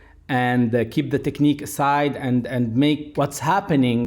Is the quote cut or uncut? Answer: cut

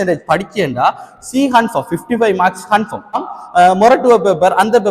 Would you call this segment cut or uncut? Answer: cut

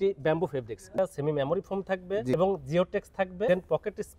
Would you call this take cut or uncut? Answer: cut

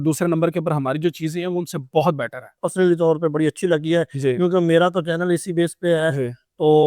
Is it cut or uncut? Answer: cut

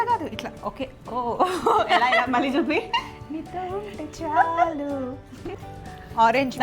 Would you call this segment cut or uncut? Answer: cut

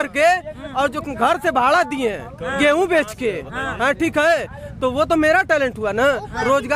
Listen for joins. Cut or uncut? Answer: uncut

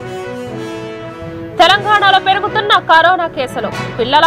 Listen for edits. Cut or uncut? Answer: uncut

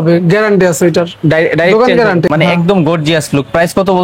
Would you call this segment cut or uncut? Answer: cut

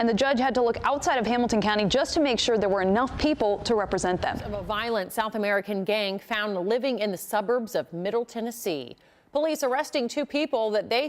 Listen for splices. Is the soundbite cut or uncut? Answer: cut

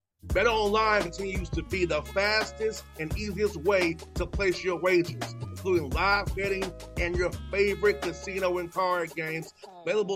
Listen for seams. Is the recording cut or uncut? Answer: uncut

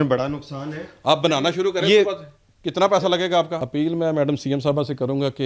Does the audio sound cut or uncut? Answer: cut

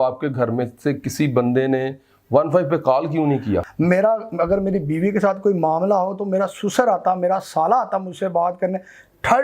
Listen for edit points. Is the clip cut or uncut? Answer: cut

